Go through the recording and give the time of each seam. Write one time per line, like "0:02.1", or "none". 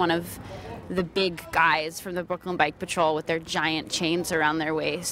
none